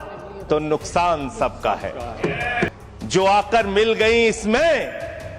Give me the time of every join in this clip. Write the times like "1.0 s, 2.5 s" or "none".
2.8 s